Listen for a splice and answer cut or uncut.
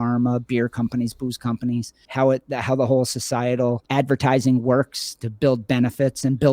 cut